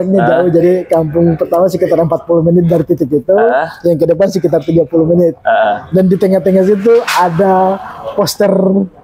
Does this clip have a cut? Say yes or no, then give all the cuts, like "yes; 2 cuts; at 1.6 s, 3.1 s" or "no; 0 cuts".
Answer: no; 0 cuts